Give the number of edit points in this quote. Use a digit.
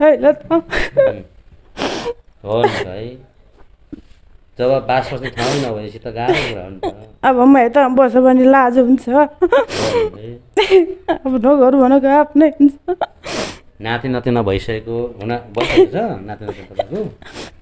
0